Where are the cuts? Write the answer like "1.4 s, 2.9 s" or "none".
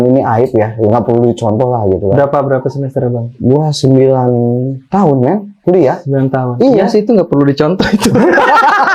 none

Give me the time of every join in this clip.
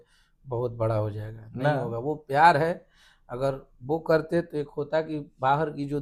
none

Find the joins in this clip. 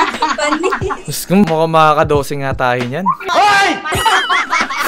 3.9 s

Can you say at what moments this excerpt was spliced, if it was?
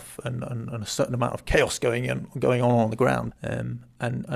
3.3 s

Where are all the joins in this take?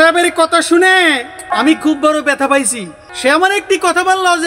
1.5 s, 3.1 s

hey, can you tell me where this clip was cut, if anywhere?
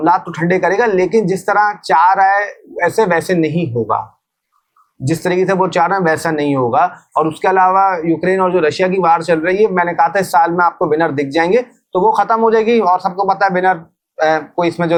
none

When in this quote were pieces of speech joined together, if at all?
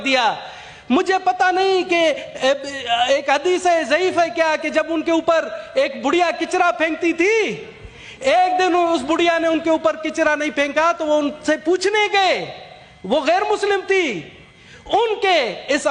none

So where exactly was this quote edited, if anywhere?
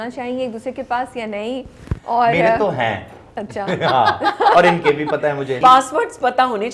5.5 s

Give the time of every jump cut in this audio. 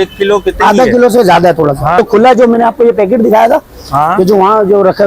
2.0 s

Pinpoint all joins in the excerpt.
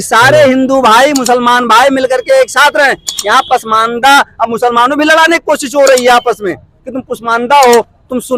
none

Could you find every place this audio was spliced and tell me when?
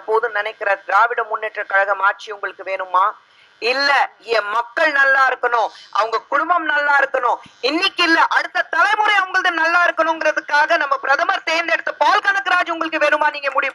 none

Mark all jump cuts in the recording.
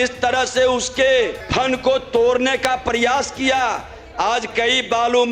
1.4 s

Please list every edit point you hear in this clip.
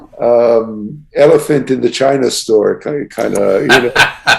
none

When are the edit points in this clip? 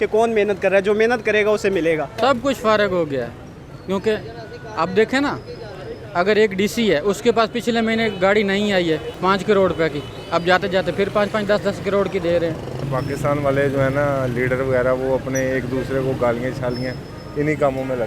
2.2 s, 9.1 s, 12.8 s

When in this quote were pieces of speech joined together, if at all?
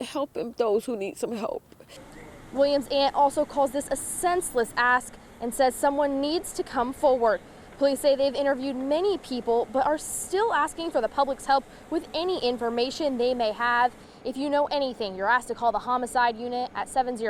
1.9 s

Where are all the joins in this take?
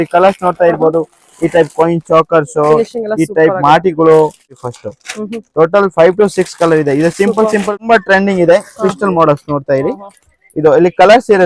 4.7 s, 7.7 s

